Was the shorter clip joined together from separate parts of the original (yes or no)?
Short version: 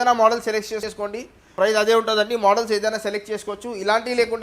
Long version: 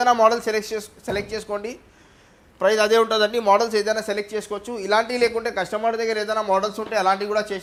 yes